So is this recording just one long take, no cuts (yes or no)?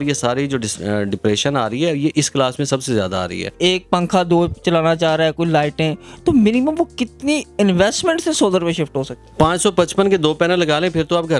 no